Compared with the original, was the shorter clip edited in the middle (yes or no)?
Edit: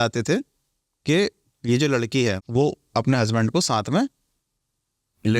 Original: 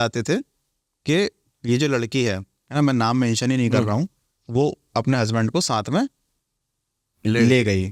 yes